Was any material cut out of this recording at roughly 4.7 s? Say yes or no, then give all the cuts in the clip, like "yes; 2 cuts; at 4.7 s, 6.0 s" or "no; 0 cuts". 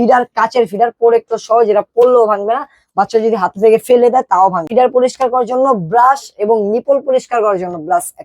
yes; 1 cut; at 4.7 s